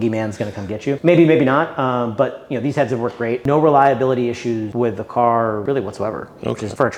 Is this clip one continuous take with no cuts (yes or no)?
yes